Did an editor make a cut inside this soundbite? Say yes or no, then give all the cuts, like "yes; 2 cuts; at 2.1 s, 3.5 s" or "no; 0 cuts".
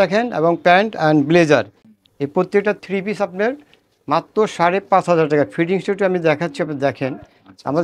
no; 0 cuts